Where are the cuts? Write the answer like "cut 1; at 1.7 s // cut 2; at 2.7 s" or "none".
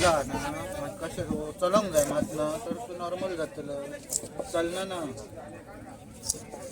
none